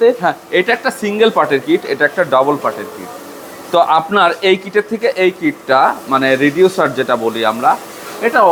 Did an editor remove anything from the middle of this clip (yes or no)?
no